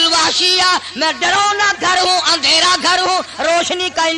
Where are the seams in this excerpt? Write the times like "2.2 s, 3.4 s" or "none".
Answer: none